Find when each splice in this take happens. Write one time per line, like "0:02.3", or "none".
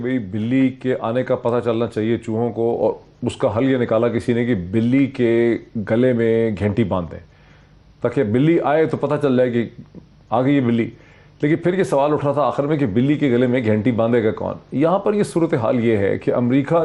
none